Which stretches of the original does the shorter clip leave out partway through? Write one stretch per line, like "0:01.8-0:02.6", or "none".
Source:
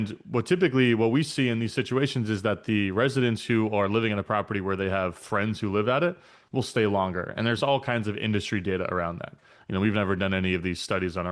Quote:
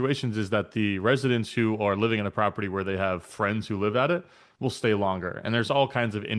none